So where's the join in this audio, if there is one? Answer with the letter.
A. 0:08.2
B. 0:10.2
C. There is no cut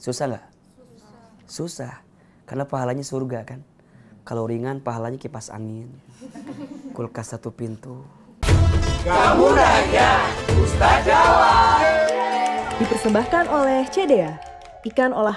A